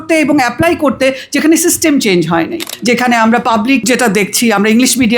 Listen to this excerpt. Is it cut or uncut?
cut